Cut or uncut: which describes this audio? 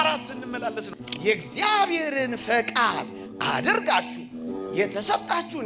cut